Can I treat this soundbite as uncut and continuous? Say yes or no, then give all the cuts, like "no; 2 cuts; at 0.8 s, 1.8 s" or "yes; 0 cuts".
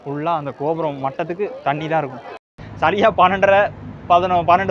no; 1 cut; at 2.5 s